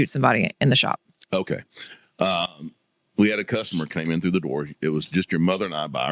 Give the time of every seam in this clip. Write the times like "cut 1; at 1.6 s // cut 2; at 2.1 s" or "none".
none

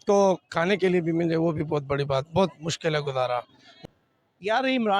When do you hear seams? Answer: cut 1; at 3.8 s

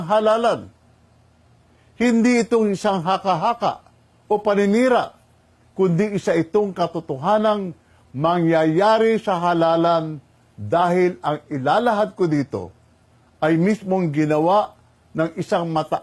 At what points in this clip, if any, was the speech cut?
none

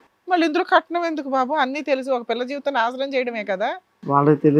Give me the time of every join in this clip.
none

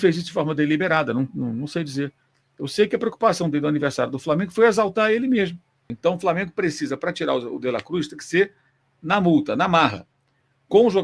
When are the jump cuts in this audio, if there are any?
cut 1; at 5.9 s

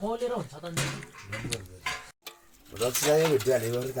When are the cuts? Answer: none

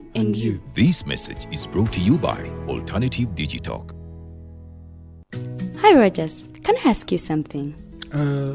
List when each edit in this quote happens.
cut 1; at 5.1 s

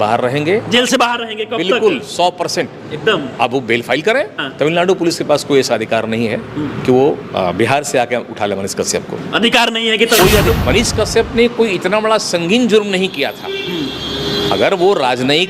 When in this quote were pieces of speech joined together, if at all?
cut 1; at 4.4 s // cut 2; at 10.5 s

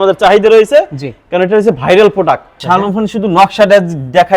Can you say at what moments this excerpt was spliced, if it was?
cut 1; at 2.6 s

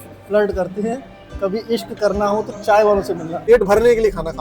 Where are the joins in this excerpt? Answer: cut 1; at 3.3 s

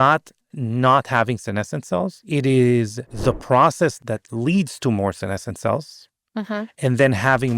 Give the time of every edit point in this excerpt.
cut 1; at 2.2 s // cut 2; at 3.0 s // cut 3; at 4.0 s

